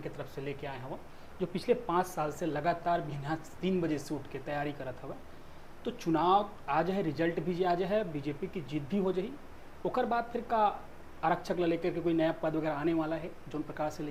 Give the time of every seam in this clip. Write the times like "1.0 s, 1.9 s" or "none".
none